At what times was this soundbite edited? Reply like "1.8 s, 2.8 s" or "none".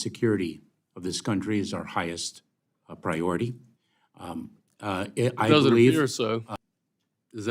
6.5 s